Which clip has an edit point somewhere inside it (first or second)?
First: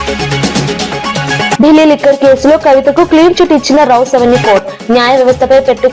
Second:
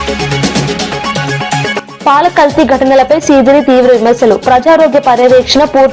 second